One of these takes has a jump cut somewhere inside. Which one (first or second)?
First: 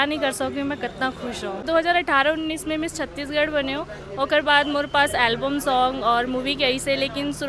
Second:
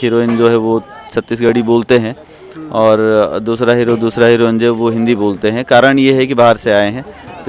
first